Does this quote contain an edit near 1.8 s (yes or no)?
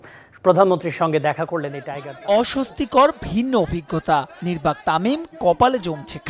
yes